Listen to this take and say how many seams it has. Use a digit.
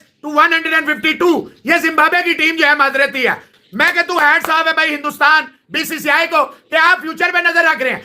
1